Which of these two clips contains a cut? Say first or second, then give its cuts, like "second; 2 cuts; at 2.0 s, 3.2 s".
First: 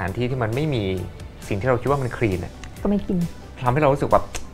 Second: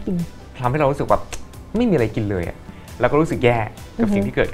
second; 1 cut; at 2.7 s